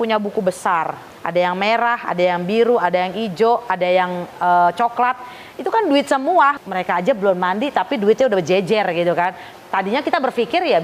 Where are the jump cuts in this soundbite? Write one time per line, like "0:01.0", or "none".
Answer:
0:01.1
0:06.6
0:09.4

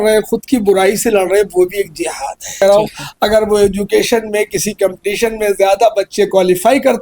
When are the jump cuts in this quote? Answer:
0:02.6

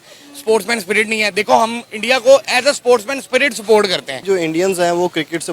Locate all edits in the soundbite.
0:04.2

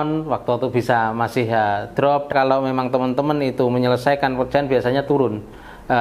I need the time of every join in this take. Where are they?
0:02.3

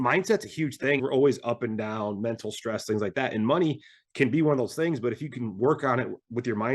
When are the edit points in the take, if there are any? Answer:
0:01.0

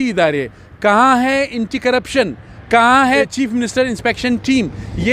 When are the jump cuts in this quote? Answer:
0:03.3

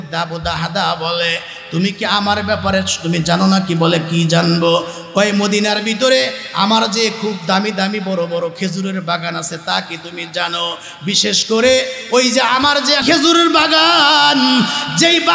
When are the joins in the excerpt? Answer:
0:13.0

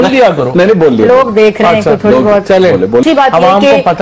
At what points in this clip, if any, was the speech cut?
0:03.0

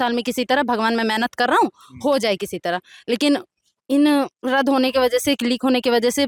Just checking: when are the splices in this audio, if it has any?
none

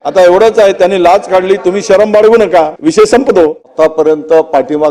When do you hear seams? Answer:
0:02.7
0:03.6

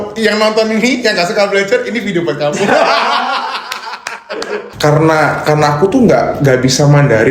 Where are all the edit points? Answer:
0:04.7

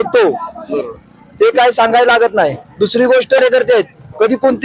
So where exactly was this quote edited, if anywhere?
0:03.4

